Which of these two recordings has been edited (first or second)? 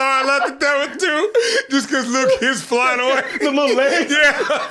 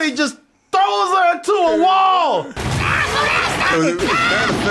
second